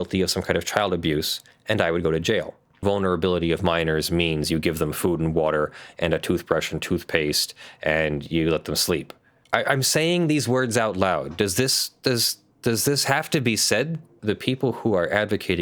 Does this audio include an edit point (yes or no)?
yes